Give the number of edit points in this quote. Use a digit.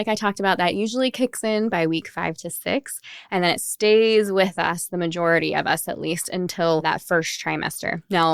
1